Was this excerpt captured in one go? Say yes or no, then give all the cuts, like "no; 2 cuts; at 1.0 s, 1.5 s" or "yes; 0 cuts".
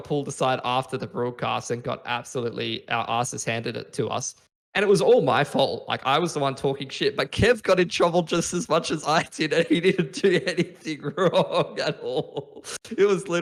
yes; 0 cuts